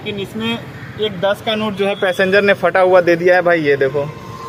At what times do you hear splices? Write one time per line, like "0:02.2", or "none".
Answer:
none

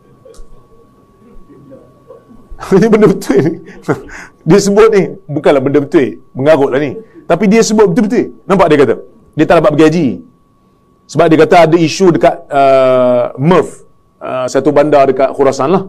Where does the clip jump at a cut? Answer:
0:09.2

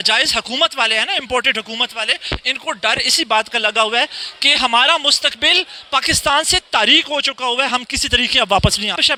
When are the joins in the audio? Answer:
none

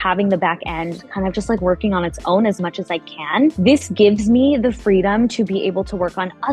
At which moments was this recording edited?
none

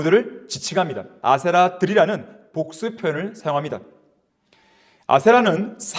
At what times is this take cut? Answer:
0:01.1

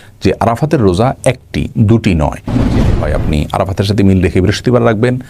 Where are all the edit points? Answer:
0:02.8

